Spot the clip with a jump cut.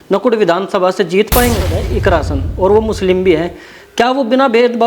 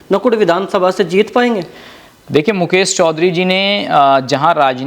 first; 1 cut; at 1.9 s

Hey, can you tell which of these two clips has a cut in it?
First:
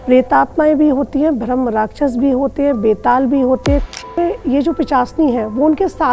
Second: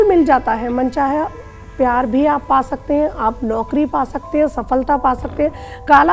first; 1 cut; at 4.2 s

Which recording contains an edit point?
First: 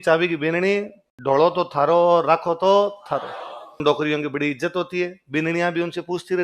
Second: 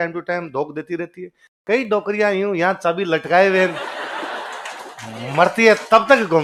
first; 1 cut; at 3.8 s

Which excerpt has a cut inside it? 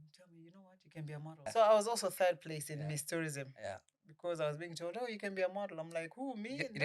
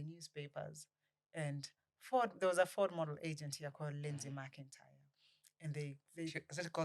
first; 1 cut; at 1.3 s

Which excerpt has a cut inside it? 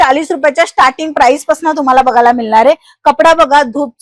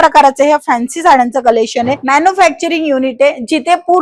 second; 1 cut; at 2.0 s

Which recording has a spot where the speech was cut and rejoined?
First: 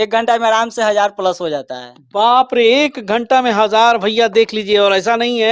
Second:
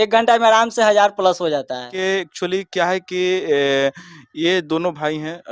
second; 1 cut; at 1.9 s

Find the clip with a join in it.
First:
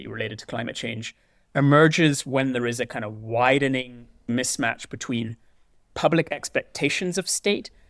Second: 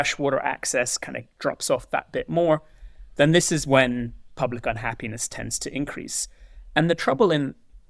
first; 1 cut; at 4.3 s

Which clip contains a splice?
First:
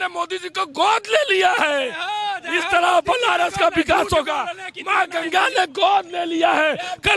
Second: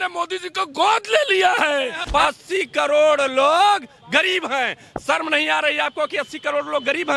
second; 1 cut; at 2.0 s

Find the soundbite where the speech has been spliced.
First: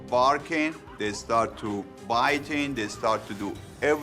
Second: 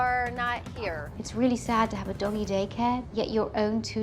second; 2 cuts; at 1.1 s, 3.1 s

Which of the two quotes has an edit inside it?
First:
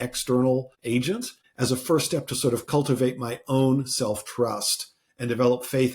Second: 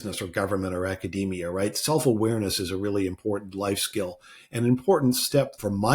first; 1 cut; at 0.9 s

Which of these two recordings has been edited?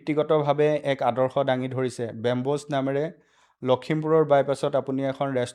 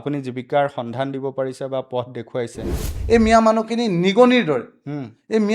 second; 1 cut; at 2.9 s

